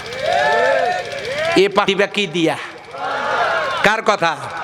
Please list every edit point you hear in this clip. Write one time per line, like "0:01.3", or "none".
0:01.8